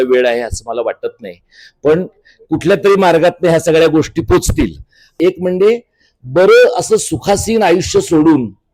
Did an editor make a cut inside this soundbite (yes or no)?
yes